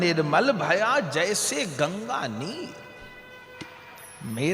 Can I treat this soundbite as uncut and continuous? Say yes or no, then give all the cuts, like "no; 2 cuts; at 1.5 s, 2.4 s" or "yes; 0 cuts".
yes; 0 cuts